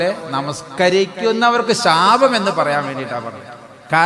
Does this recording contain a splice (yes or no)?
no